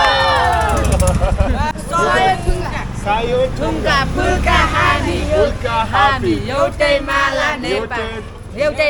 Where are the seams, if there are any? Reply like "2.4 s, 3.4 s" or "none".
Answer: 1.7 s